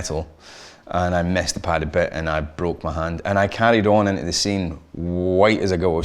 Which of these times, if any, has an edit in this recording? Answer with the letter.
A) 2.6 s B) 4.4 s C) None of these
C